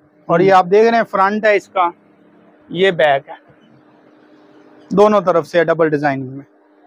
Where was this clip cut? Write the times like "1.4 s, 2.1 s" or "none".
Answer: none

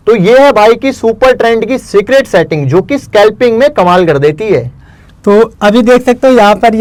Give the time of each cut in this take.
none

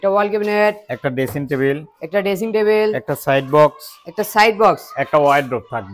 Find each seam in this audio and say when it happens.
none

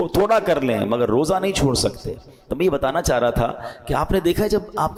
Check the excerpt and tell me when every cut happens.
none

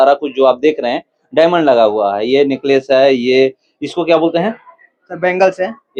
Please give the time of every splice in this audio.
none

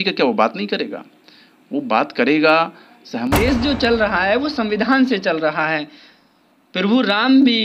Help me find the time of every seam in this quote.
3.3 s

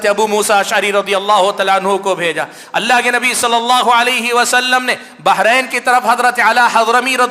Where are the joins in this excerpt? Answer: none

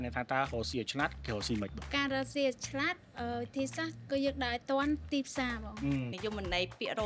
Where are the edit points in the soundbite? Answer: 6.1 s

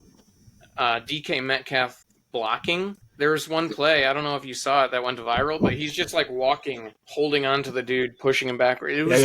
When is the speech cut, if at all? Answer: 3.0 s

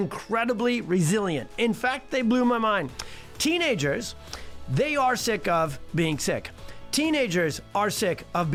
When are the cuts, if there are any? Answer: none

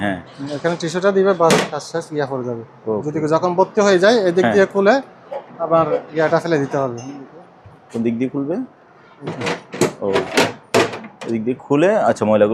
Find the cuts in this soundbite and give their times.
none

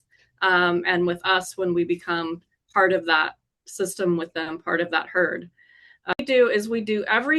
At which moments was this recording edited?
6.2 s

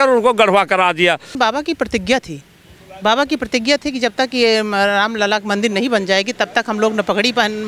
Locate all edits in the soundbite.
1.3 s

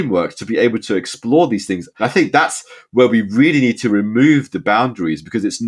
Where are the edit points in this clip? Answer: 2.0 s

